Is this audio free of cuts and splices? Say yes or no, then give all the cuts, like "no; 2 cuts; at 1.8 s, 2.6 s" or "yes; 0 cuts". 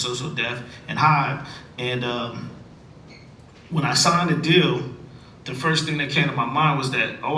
yes; 0 cuts